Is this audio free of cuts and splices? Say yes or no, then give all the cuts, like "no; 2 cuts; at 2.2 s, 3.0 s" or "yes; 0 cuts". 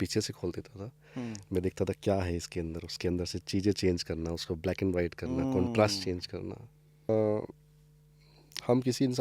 no; 1 cut; at 7.1 s